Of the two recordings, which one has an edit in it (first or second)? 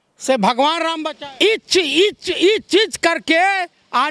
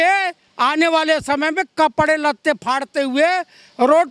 first